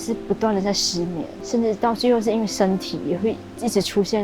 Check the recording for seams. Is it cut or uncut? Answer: cut